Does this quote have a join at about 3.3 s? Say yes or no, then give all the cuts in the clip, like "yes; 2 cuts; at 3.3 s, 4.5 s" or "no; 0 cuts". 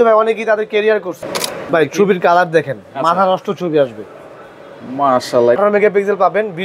no; 2 cuts; at 1.4 s, 5.6 s